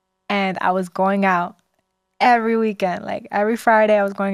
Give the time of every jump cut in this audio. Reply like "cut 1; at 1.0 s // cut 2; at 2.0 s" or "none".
none

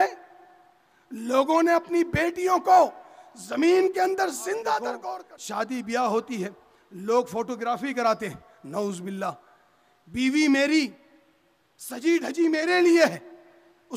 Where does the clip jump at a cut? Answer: cut 1; at 5.0 s

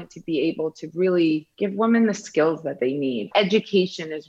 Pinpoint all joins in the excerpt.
cut 1; at 1.5 s // cut 2; at 3.3 s

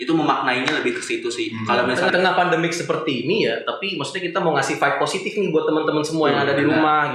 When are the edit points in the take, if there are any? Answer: cut 1; at 2.1 s

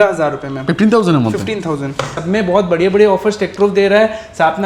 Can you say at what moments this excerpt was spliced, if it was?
cut 1; at 2.1 s

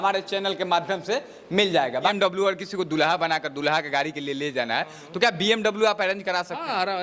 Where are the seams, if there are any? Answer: cut 1; at 2.1 s

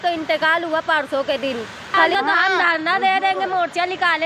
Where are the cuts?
cut 1; at 2.1 s

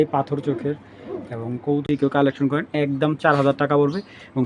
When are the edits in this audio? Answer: cut 1; at 1.8 s

